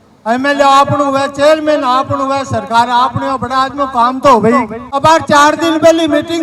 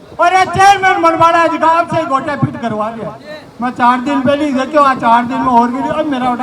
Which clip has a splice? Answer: first; 1 cut; at 4.8 s

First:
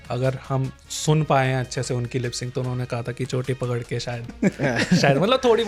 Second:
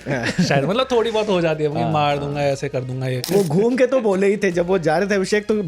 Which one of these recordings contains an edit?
second; 1 cut; at 3.1 s

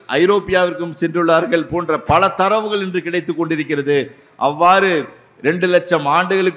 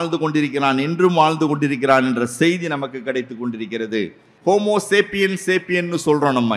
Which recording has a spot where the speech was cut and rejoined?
second; 1 cut; at 4.2 s

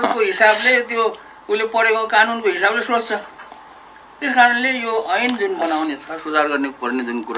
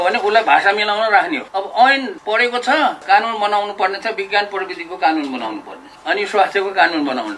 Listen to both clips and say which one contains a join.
second; 3 cuts; at 1.4 s, 2.5 s, 6.0 s

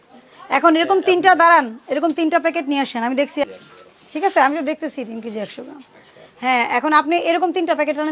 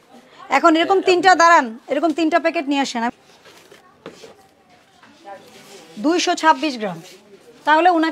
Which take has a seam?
second; 1 cut; at 3.1 s

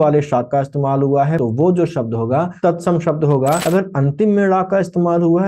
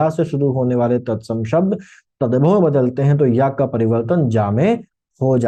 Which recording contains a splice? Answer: first; 3 cuts; at 1.4 s, 2.5 s, 3.6 s

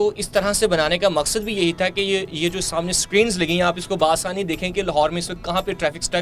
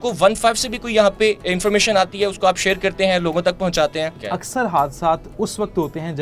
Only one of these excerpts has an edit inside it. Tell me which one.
second; 1 cut; at 4.2 s

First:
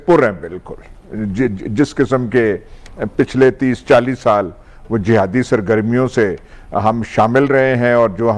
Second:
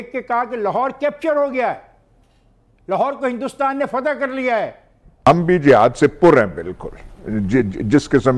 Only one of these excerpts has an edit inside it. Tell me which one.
second; 1 cut; at 5.0 s

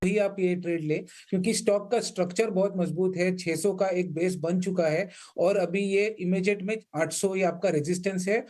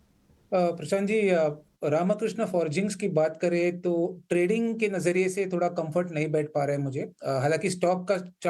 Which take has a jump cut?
second; 1 cut; at 5.0 s

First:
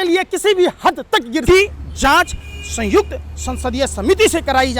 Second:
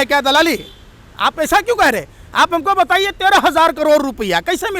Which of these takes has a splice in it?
first; 1 cut; at 1.4 s

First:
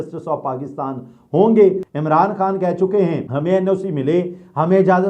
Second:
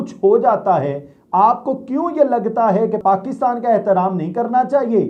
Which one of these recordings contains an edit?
first; 1 cut; at 1.9 s

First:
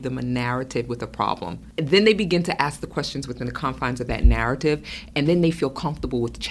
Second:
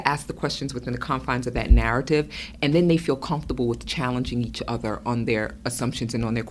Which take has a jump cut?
first; 1 cut; at 1.6 s

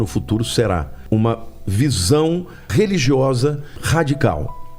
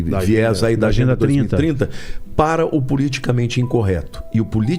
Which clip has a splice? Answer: first; 3 cuts; at 0.9 s, 2.7 s, 3.8 s

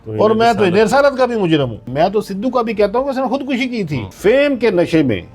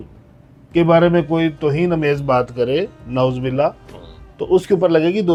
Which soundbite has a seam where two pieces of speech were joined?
first; 2 cuts; at 1.8 s, 4.1 s

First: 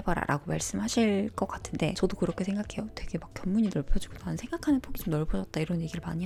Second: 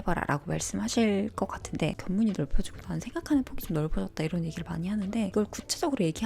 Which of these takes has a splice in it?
second; 2 cuts; at 1.9 s, 5.3 s

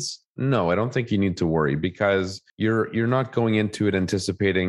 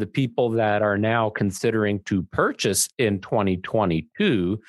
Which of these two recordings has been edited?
first; 1 cut; at 2.4 s

